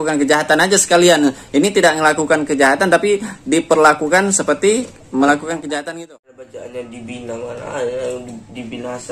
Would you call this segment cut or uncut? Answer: cut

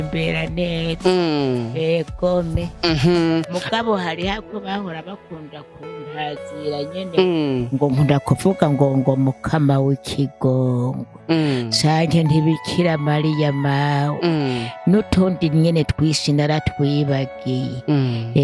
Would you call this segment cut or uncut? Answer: uncut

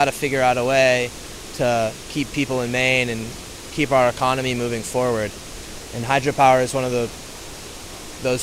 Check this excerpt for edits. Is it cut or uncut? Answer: uncut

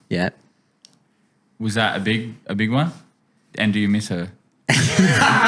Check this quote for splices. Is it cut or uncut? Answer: uncut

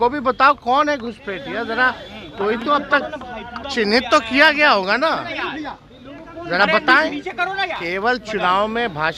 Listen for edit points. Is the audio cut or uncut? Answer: uncut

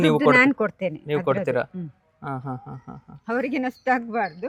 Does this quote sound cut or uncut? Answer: uncut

